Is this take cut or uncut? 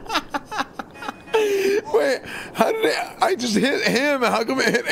uncut